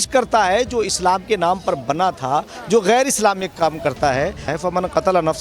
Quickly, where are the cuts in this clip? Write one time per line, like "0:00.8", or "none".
0:04.5